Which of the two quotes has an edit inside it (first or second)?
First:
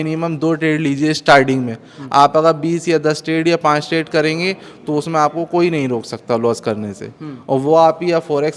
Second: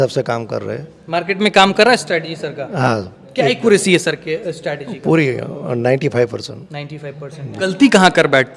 second